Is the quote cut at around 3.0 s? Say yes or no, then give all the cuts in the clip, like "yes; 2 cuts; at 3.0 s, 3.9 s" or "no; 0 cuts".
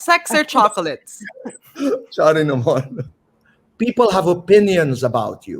yes; 1 cut; at 3.0 s